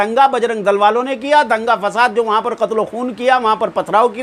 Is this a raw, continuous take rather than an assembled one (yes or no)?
yes